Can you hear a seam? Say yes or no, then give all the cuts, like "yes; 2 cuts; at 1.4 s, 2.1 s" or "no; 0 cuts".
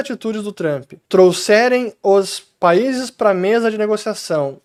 no; 0 cuts